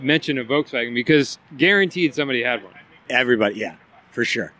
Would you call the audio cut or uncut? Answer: uncut